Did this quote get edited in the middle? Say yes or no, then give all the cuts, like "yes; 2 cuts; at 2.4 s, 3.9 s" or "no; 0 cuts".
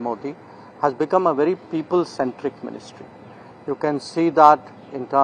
no; 0 cuts